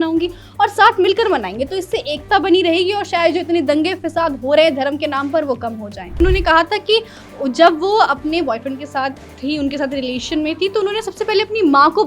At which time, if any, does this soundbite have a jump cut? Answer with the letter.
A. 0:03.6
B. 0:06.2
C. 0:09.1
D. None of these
B